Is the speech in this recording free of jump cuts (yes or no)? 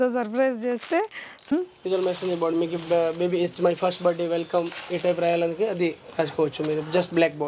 no